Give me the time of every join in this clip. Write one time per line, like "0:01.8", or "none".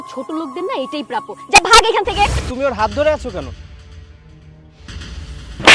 0:02.4